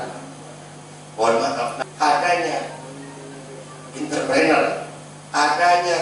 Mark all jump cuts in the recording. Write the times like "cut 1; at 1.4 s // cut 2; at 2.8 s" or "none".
cut 1; at 1.7 s